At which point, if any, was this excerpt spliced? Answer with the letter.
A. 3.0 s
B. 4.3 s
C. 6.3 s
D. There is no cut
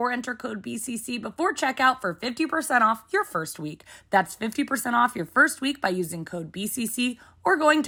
D